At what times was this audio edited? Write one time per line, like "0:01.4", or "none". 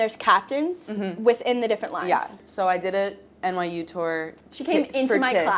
0:02.4

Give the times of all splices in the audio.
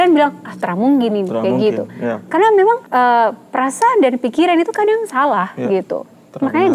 0:02.8

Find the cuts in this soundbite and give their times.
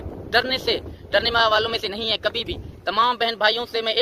none

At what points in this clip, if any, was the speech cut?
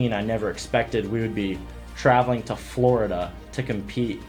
none

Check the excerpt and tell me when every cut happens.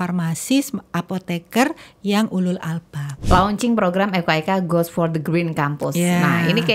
0:03.1

